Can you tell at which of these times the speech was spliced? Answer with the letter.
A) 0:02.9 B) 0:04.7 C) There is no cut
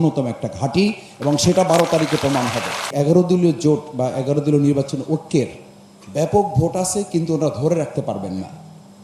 A